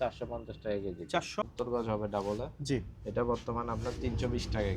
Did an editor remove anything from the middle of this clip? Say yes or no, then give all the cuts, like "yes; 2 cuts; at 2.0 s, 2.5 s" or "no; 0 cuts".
yes; 1 cut; at 1.4 s